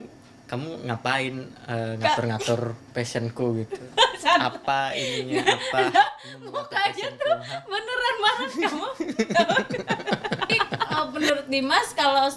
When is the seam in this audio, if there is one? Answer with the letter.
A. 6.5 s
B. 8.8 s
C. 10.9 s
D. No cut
C